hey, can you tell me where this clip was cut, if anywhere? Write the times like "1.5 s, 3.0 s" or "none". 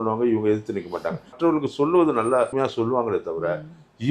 1.3 s, 2.5 s